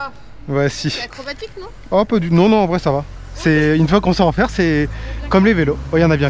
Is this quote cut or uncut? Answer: uncut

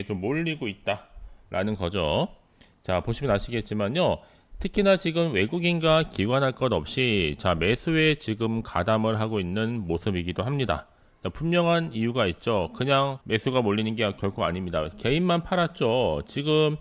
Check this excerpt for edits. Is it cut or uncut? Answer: cut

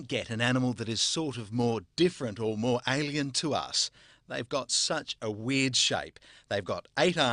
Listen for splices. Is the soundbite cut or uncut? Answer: cut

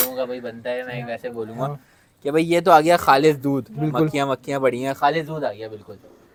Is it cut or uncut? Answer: uncut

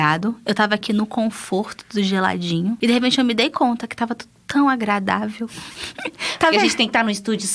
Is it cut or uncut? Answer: cut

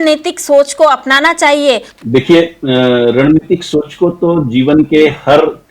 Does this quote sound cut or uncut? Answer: cut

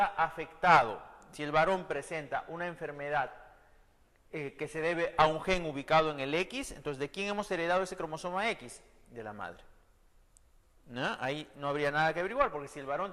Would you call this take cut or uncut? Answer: uncut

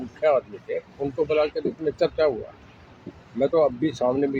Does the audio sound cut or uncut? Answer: uncut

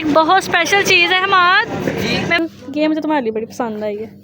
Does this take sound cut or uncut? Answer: cut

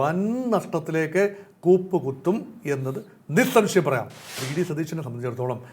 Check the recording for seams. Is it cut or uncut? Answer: cut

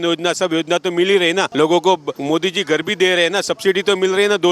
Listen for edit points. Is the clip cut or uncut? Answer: cut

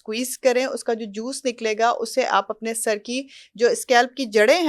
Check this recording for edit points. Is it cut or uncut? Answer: uncut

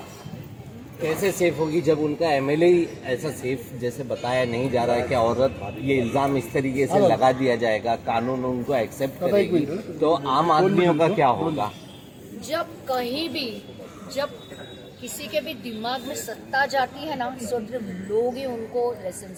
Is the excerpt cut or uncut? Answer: uncut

